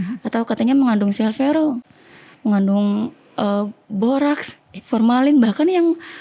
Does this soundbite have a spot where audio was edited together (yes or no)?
no